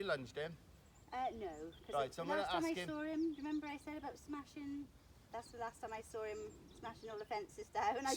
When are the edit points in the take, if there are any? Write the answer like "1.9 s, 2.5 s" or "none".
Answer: none